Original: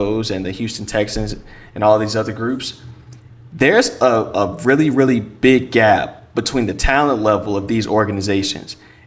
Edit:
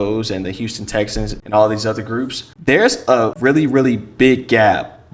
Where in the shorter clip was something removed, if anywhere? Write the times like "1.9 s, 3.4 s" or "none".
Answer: 1.4 s, 2.4 s, 3.3 s